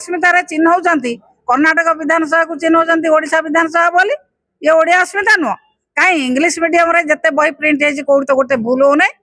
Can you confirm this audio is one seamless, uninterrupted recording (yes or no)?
yes